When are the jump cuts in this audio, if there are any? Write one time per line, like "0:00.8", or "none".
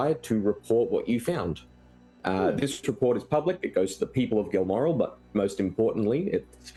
none